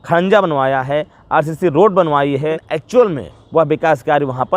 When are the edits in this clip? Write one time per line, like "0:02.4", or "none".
0:02.6